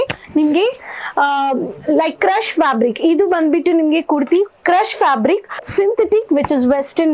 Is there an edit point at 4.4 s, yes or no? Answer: no